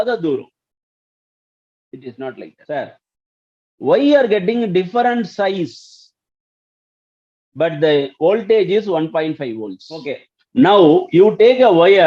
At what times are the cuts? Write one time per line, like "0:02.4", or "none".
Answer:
0:02.6
0:10.3